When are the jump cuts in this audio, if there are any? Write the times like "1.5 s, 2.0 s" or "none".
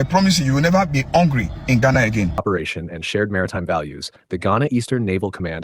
2.4 s